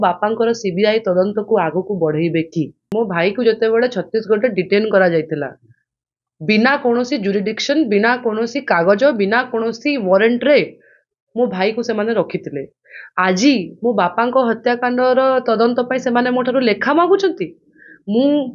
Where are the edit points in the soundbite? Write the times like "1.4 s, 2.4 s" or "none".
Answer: 2.8 s